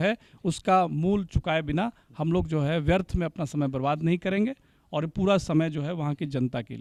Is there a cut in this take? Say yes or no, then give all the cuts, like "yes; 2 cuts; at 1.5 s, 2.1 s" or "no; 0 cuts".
no; 0 cuts